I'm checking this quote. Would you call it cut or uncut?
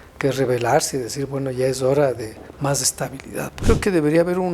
cut